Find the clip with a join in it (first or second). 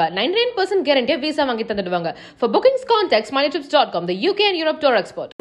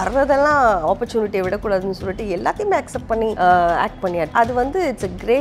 second